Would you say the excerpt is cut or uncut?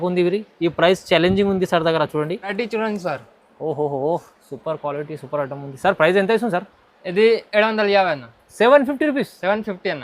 cut